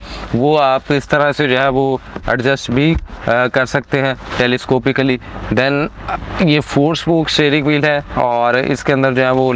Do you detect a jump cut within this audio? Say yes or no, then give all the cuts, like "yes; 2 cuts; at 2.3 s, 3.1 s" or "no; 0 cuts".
no; 0 cuts